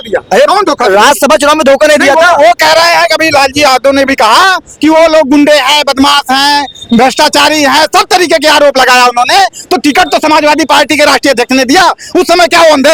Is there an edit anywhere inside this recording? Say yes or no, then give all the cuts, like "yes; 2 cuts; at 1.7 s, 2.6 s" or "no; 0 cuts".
no; 0 cuts